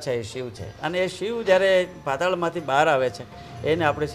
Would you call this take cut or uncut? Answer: uncut